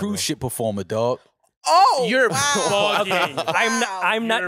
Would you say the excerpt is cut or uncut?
uncut